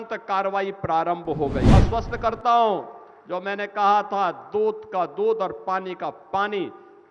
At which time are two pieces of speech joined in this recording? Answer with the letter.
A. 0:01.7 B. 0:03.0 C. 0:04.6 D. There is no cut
A